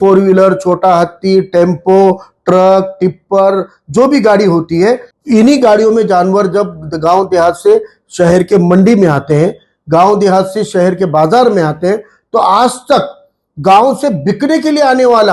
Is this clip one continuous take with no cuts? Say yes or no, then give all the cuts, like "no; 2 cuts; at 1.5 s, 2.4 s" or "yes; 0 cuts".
no; 1 cut; at 5.1 s